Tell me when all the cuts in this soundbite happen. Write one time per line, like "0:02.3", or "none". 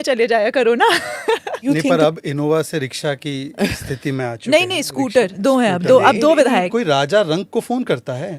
0:01.6
0:06.7